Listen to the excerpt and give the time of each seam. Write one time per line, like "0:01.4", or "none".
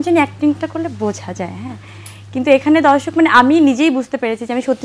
none